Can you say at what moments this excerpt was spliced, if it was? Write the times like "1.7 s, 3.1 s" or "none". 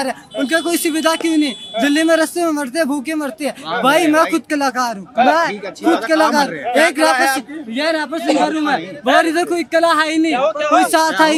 none